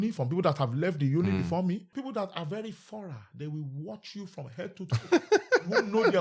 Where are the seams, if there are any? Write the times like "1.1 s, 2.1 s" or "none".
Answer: 1.9 s